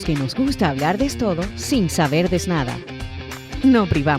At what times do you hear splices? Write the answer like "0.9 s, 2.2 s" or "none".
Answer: 3.1 s